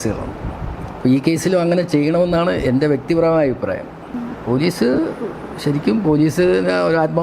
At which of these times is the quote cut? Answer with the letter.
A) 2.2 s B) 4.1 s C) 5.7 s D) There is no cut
B